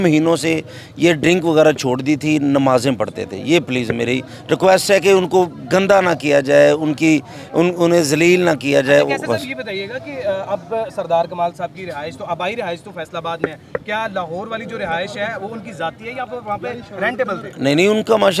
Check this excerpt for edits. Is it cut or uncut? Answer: uncut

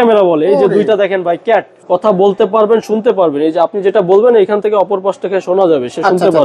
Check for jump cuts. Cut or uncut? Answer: cut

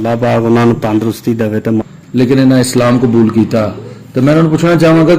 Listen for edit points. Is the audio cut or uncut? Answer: cut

